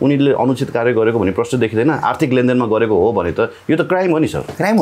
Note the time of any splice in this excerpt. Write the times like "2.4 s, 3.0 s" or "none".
none